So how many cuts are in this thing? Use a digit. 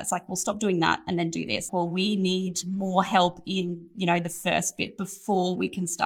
1